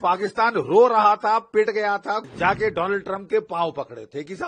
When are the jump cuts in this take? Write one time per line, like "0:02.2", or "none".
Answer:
0:02.2

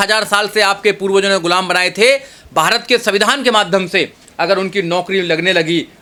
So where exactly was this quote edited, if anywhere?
none

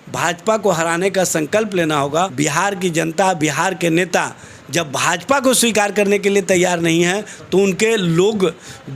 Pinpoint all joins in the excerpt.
0:02.3

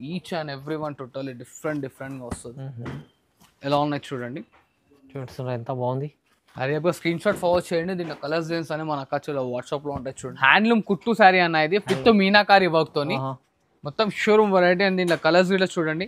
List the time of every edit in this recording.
0:10.2

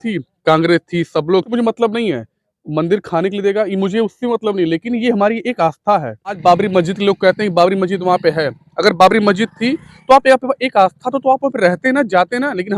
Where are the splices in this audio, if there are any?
0:01.5
0:06.4

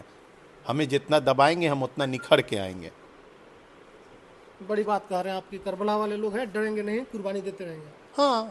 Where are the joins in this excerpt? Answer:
none

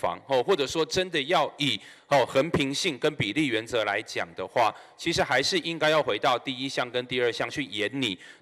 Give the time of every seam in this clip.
none

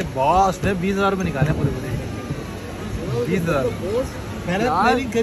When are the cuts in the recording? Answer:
none

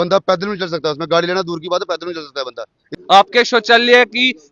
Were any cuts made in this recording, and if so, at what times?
0:02.9

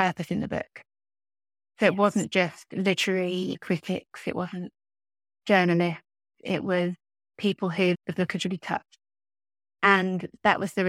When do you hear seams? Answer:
none

